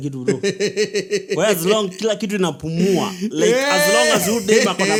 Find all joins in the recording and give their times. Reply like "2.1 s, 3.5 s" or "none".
none